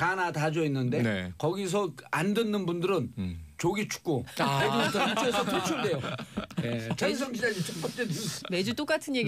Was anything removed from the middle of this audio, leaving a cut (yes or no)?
yes